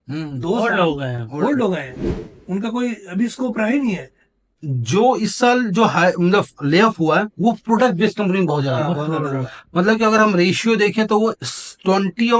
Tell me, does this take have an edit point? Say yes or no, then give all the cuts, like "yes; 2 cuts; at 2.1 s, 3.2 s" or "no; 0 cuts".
yes; 1 cut; at 4.5 s